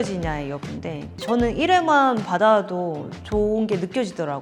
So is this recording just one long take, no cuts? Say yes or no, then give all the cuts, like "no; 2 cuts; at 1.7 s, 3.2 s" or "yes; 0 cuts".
no; 1 cut; at 1.1 s